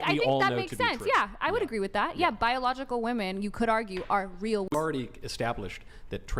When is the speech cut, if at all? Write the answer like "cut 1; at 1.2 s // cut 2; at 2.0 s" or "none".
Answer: cut 1; at 4.7 s